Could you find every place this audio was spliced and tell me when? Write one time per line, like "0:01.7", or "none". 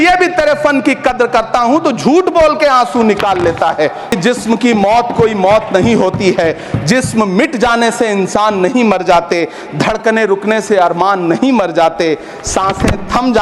0:04.1